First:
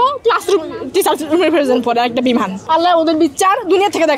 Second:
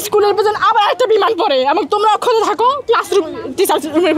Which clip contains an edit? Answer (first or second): first